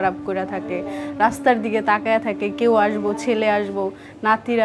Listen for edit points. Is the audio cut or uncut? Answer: uncut